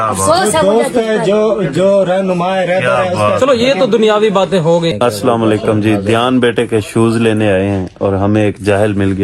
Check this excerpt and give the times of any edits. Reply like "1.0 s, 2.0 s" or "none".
4.9 s